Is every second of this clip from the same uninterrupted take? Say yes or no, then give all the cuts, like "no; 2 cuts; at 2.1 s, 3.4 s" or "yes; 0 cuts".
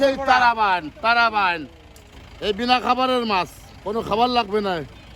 yes; 0 cuts